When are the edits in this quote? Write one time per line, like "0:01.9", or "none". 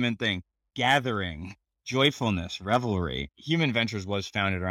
0:03.2